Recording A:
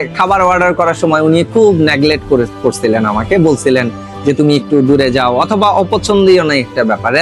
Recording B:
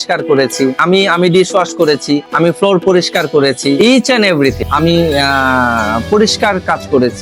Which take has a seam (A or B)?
B